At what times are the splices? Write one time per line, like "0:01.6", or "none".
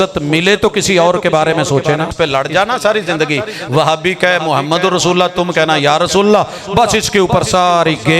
0:02.1